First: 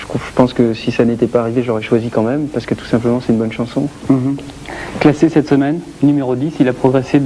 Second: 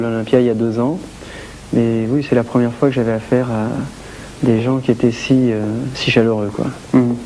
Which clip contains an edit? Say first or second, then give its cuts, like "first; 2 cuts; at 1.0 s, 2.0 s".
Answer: first; 1 cut; at 1.4 s